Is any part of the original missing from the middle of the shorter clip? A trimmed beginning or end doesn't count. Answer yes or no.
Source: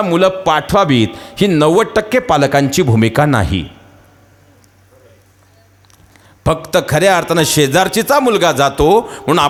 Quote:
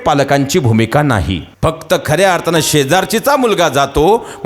yes